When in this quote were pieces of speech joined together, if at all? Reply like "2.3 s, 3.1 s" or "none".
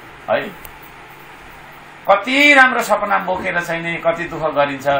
none